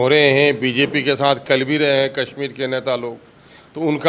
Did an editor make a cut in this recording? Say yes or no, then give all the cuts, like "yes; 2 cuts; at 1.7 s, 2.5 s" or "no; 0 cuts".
no; 0 cuts